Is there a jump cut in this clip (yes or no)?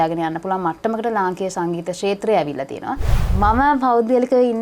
yes